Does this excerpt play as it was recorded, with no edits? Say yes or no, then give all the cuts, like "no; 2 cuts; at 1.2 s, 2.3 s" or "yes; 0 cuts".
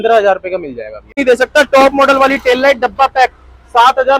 no; 1 cut; at 1.1 s